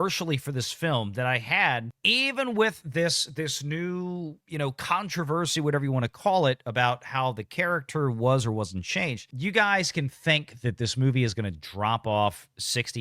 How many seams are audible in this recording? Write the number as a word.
two